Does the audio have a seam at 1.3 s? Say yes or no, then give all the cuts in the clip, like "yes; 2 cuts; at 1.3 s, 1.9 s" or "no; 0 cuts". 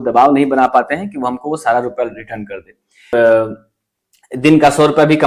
no; 1 cut; at 3.1 s